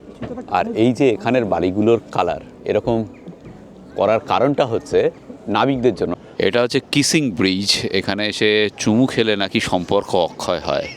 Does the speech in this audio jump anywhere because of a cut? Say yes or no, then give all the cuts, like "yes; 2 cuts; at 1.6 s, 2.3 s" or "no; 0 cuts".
yes; 1 cut; at 6.1 s